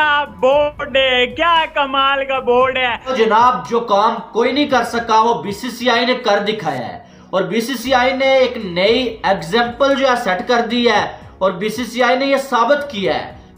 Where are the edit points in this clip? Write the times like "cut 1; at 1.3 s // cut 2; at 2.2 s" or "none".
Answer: cut 1; at 3.1 s